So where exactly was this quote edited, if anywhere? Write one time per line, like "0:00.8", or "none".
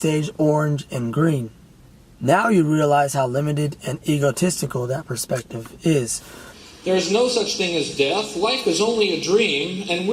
0:06.5